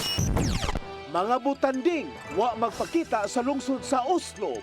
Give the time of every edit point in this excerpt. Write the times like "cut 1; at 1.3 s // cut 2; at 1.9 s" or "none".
cut 1; at 0.9 s

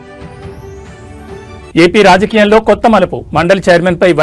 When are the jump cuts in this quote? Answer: cut 1; at 1.7 s

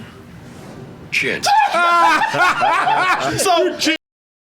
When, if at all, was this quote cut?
cut 1; at 3.2 s

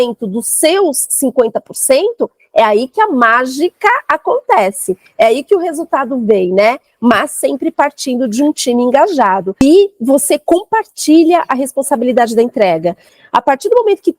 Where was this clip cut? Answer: cut 1; at 9.6 s // cut 2; at 13.1 s

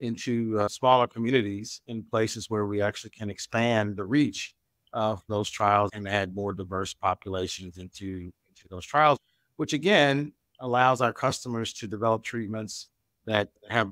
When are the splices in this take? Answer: cut 1; at 0.7 s // cut 2; at 5.9 s // cut 3; at 9.4 s

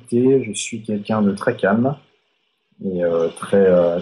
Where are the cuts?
none

